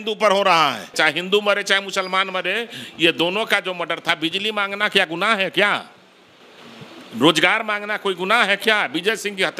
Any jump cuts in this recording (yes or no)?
yes